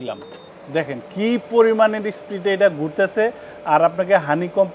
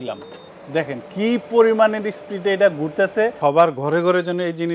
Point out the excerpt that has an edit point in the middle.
second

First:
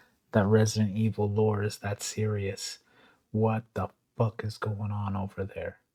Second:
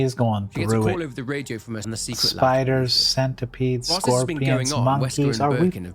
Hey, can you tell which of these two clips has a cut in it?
second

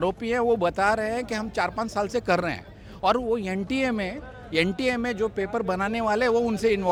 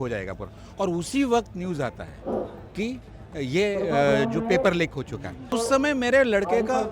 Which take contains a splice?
second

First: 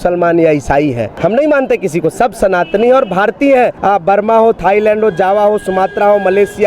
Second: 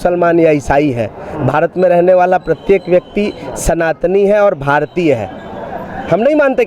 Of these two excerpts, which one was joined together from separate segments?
first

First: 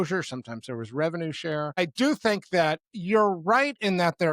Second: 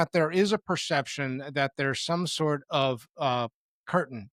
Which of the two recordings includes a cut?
first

